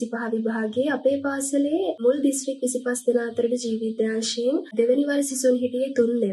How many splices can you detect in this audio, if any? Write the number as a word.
zero